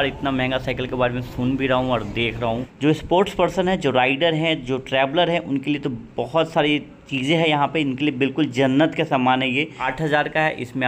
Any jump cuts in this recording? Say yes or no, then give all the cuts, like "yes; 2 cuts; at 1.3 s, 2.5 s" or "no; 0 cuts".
yes; 2 cuts; at 2.7 s, 9.8 s